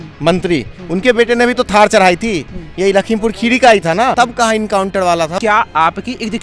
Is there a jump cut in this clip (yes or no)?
yes